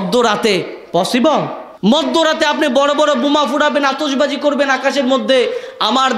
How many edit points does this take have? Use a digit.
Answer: 1